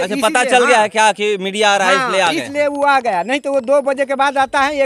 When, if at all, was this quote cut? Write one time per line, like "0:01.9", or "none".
none